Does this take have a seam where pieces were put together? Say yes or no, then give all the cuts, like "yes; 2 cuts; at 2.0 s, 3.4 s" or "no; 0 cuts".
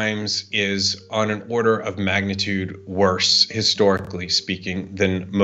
no; 0 cuts